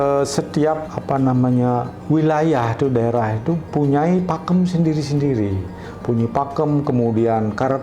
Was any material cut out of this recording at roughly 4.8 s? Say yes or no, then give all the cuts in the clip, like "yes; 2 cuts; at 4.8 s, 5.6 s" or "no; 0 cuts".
no; 1 cut; at 0.9 s